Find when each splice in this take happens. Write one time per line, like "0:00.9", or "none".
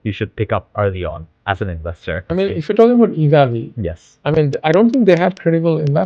0:02.3